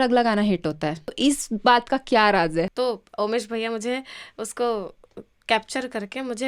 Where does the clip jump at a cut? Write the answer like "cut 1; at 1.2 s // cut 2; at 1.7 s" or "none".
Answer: cut 1; at 1.2 s // cut 2; at 2.7 s

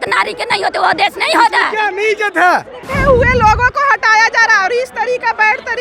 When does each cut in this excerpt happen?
cut 1; at 2.9 s

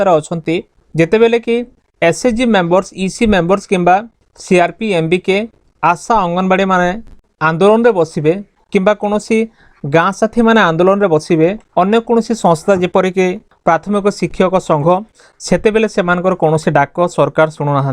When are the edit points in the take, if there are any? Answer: cut 1; at 13.5 s // cut 2; at 15.2 s

